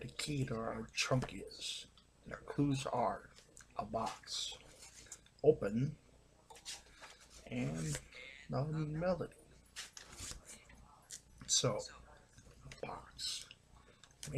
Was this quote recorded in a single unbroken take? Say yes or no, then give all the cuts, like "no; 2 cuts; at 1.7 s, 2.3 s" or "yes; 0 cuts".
no; 1 cut; at 12.3 s